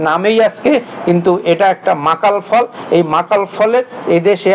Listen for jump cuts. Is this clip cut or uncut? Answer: uncut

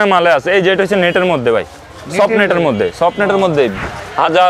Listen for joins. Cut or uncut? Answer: uncut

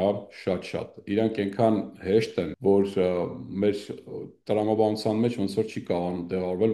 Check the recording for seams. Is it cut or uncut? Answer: cut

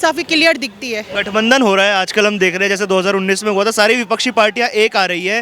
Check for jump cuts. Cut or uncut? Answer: cut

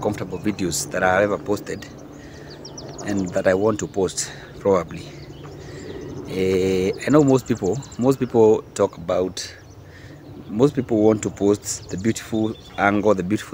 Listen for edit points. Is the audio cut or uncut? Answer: uncut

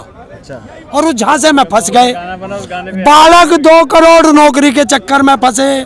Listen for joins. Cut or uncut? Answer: uncut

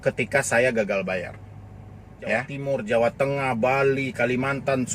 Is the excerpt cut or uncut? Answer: cut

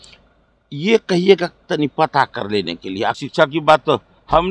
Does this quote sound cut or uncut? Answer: cut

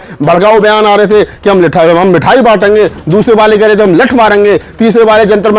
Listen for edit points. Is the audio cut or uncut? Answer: uncut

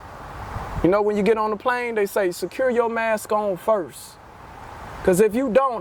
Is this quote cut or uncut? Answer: uncut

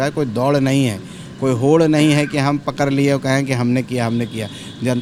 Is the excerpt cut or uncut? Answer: uncut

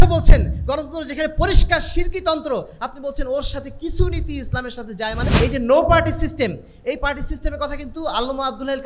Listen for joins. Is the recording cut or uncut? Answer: cut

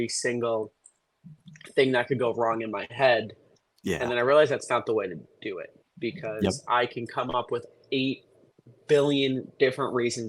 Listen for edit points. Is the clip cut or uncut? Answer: uncut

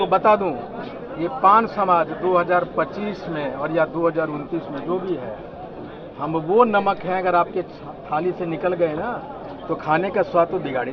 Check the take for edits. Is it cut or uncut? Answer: uncut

